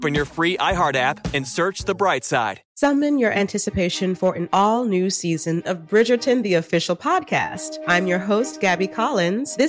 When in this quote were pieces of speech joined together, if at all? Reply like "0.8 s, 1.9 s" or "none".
2.6 s

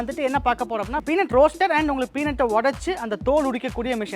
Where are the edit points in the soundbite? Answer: 0.9 s

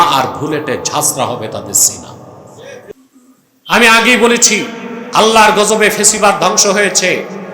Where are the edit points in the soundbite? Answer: 2.9 s

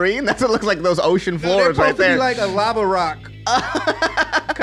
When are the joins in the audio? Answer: none

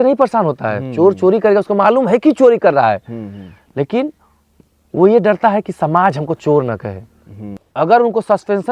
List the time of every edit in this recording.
7.6 s

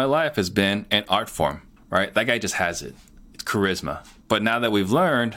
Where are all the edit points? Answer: 1.7 s, 4.2 s

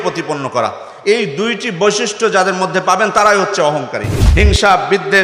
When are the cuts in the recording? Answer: 4.2 s

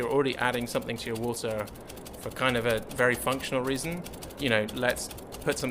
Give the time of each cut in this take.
4.2 s

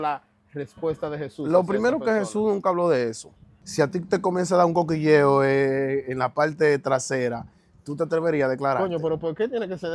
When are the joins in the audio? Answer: 3.6 s

